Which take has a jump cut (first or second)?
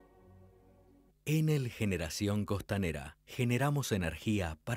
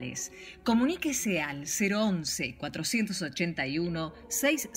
first